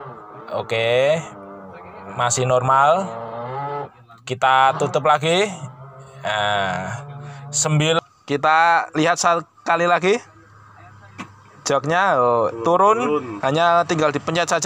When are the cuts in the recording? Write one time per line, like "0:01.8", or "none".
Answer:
0:08.0